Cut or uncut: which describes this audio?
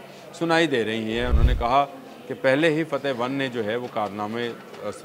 cut